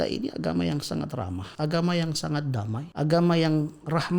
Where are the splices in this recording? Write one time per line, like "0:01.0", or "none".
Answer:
0:01.4
0:02.8